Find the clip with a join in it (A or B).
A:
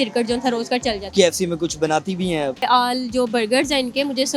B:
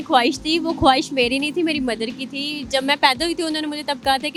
A